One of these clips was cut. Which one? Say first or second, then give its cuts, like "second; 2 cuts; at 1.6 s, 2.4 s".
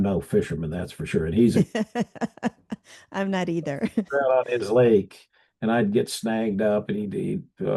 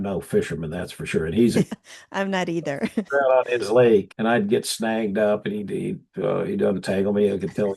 second; 2 cuts; at 1.7 s, 4.1 s